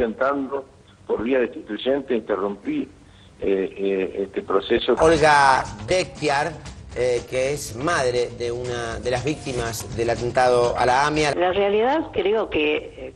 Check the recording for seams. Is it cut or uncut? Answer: cut